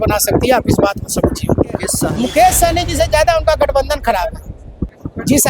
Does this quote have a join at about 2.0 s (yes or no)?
yes